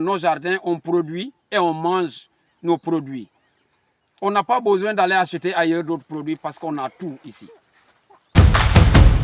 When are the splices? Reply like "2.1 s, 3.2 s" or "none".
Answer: 8.2 s